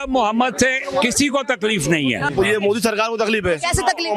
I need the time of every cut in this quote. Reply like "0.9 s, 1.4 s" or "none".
2.3 s